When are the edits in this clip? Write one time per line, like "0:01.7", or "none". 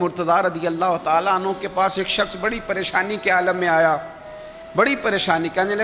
none